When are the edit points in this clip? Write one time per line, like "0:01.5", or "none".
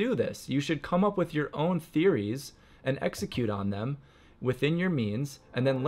none

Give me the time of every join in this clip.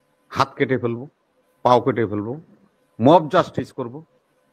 none

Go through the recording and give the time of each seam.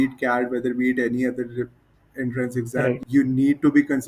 0:03.0

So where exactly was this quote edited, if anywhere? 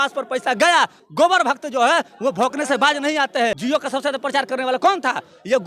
0:01.0
0:03.6

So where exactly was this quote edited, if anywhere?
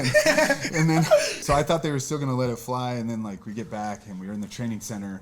0:01.3

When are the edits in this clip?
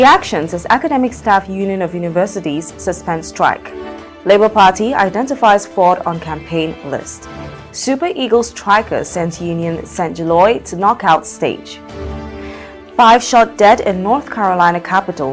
none

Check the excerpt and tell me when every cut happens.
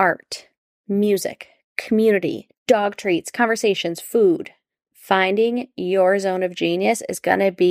0:02.5

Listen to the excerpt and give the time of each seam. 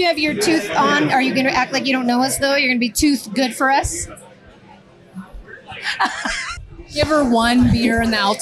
0:06.5

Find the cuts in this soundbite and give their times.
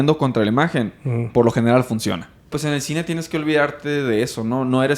0:02.5

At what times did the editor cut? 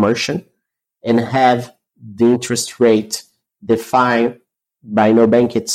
none

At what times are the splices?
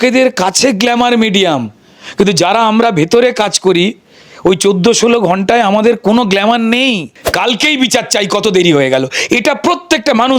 0:07.2

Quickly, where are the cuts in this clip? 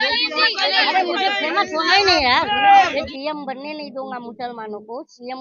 0:03.1

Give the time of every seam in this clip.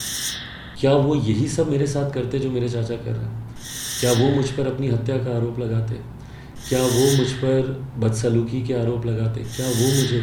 none

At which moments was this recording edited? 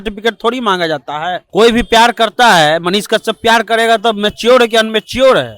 0:01.4

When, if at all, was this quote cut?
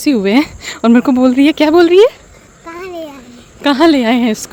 none

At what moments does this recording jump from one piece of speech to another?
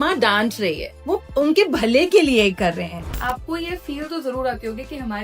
0:00.9
0:03.0

